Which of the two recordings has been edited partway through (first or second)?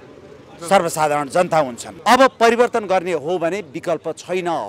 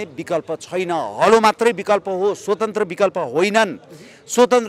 first